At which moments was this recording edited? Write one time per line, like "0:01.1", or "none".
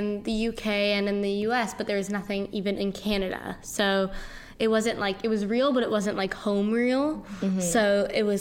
none

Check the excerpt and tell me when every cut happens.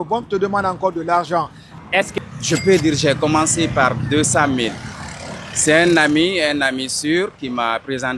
0:01.9

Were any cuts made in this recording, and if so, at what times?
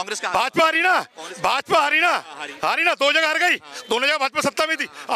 none

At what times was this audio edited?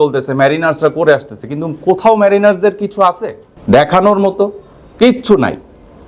none

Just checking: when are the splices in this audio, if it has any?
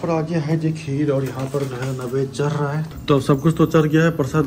0:02.9

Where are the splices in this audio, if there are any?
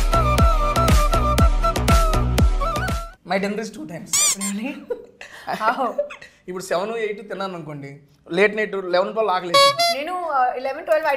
0:03.0

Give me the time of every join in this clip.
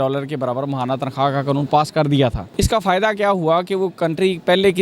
0:02.4

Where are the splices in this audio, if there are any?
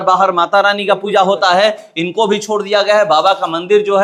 none

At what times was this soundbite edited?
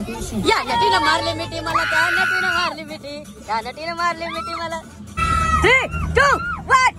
0:05.1

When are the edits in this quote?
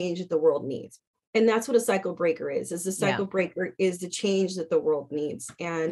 none

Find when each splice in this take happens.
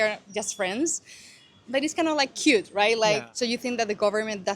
0:03.3

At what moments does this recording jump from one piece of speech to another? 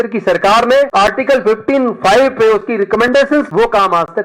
0:00.9
0:03.5

